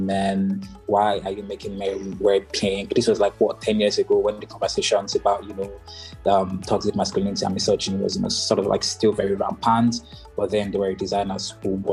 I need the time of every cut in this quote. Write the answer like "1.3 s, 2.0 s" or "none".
none